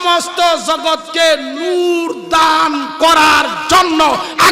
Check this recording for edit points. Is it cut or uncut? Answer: uncut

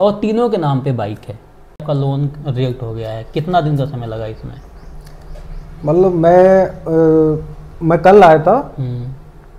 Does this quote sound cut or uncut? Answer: cut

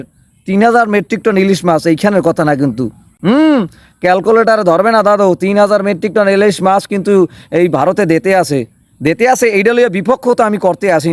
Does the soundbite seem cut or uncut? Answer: uncut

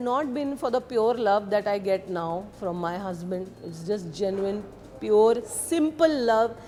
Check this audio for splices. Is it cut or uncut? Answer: uncut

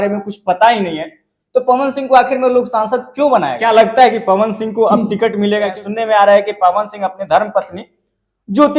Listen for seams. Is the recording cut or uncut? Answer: cut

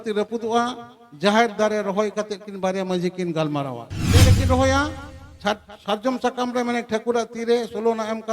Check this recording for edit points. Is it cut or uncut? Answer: cut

